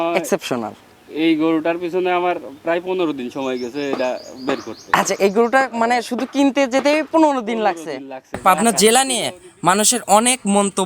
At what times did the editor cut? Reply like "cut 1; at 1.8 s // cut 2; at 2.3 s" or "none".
cut 1; at 8.4 s